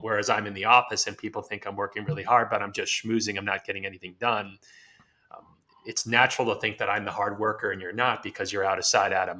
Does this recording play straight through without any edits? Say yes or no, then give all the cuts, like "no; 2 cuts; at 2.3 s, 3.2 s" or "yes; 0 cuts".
yes; 0 cuts